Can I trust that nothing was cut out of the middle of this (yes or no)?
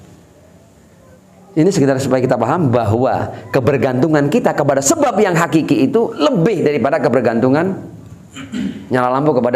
no